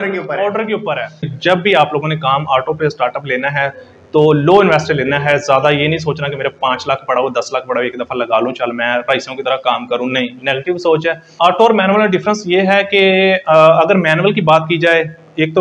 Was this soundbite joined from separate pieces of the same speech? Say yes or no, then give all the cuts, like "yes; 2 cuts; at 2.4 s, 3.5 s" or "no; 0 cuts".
yes; 2 cuts; at 1.3 s, 11.3 s